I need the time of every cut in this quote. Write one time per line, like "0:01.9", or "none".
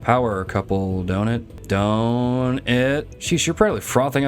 0:01.5
0:03.1